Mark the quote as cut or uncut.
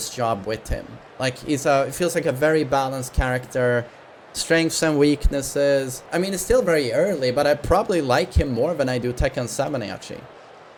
uncut